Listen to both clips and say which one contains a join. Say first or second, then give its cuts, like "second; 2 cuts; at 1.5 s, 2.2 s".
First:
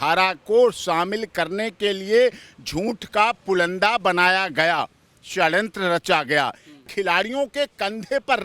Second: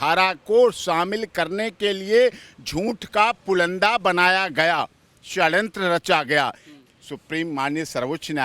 first; 1 cut; at 6.8 s